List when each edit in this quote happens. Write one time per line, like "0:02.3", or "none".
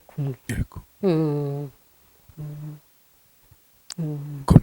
0:02.2

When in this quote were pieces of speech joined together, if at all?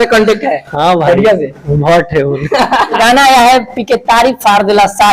0:03.0

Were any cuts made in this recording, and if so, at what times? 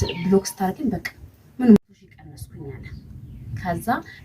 0:01.8

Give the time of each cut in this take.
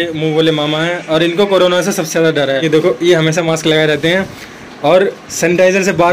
0:02.6

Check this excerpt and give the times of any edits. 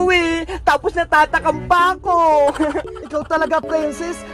0:03.0

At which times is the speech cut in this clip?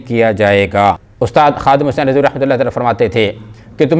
0:01.1

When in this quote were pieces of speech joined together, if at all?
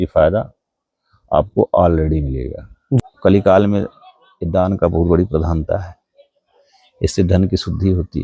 0:03.0

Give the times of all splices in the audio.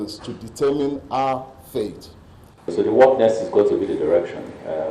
0:02.7

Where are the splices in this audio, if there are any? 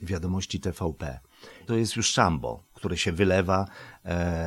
0:01.7

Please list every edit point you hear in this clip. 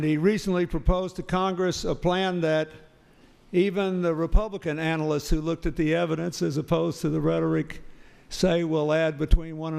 0:08.3

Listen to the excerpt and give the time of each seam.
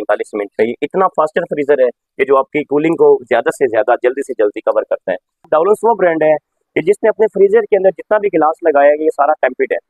0:05.5

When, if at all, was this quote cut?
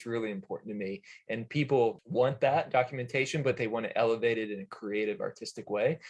0:02.0

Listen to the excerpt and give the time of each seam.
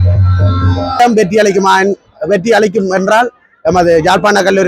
0:01.0

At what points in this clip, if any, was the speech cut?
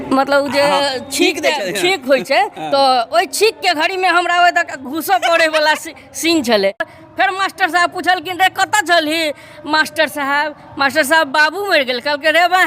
0:06.9

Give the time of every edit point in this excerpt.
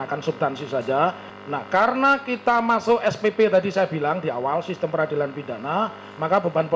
0:01.3

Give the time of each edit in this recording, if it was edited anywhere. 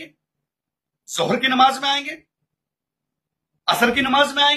none

